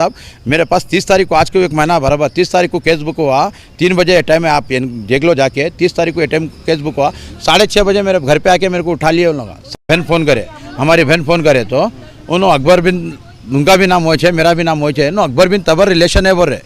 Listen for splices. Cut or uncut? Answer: cut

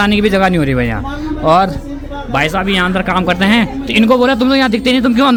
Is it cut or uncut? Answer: uncut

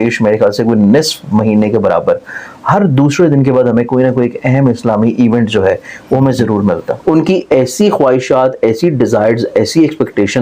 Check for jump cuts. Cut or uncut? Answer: cut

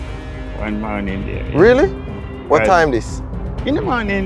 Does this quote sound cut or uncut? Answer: uncut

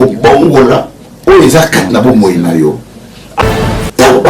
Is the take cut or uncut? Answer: cut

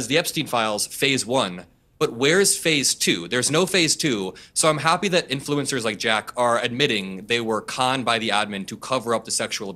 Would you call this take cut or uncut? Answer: uncut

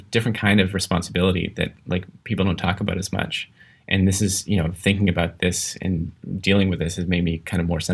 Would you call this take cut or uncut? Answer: uncut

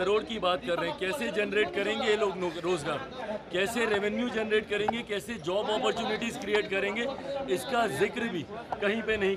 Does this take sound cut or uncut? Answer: uncut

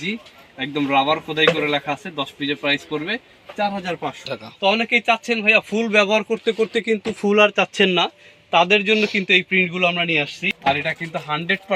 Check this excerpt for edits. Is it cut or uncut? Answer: cut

